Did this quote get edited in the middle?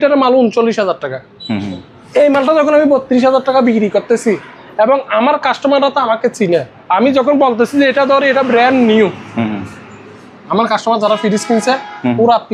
no; 0 cuts

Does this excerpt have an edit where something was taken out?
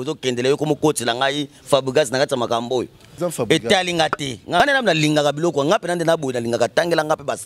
yes; 2 cuts; at 3.0 s, 4.6 s

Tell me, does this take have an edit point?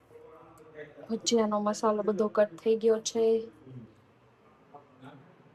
no; 0 cuts

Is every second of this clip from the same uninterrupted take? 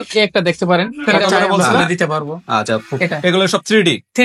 no; 1 cut; at 1.6 s

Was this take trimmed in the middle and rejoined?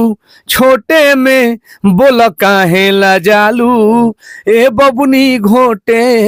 no; 0 cuts

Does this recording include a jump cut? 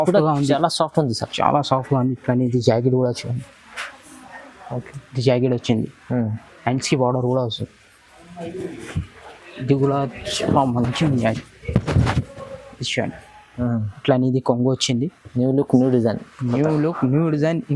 yes; 1 cut; at 13.5 s

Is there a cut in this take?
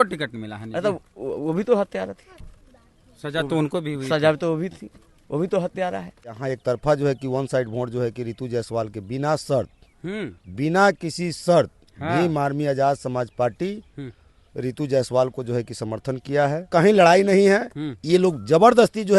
yes; 2 cuts; at 6.4 s, 16.7 s

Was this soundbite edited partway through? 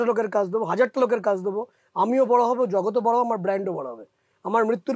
no; 0 cuts

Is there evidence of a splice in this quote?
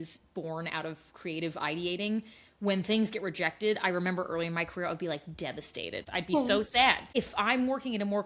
yes; 2 cuts; at 6.1 s, 7.0 s

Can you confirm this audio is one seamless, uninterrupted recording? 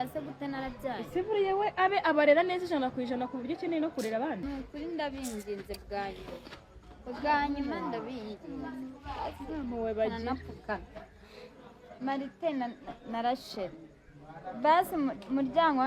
no; 1 cut; at 4.4 s

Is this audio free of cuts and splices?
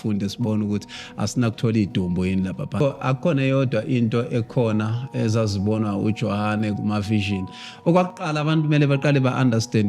no; 1 cut; at 2.7 s

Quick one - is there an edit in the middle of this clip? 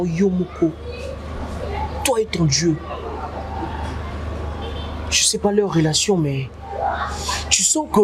no; 0 cuts

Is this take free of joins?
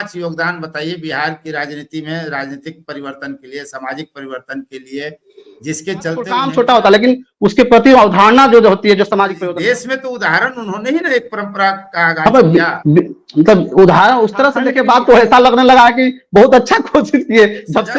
no; 3 cuts; at 6.4 s, 9.4 s, 14.6 s

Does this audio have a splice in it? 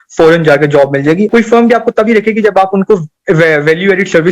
yes; 1 cut; at 1.3 s

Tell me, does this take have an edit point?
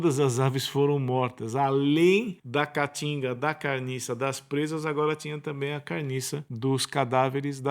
yes; 2 cuts; at 2.4 s, 6.5 s

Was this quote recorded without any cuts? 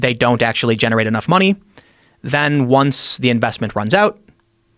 no; 1 cut; at 1.2 s

